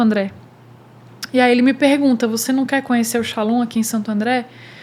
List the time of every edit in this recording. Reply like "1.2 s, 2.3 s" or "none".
none